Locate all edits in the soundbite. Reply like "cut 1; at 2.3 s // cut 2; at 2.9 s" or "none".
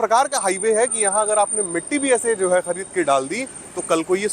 none